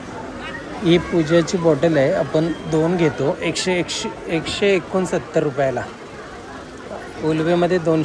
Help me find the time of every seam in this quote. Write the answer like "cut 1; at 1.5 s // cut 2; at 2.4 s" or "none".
none